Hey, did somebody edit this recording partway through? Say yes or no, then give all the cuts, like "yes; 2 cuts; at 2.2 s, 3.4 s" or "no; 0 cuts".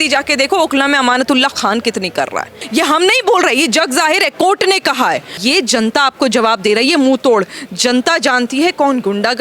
yes; 2 cuts; at 2.5 s, 5.3 s